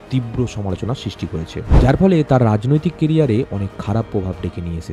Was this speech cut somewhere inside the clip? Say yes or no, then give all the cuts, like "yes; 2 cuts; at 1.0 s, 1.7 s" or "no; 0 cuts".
no; 0 cuts